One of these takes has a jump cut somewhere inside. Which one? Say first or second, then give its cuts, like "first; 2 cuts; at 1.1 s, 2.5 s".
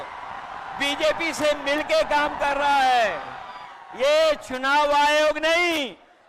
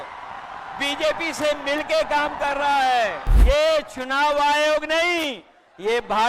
second; 1 cut; at 3.3 s